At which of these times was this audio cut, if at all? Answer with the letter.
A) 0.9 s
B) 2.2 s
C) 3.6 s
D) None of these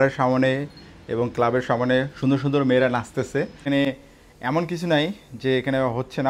C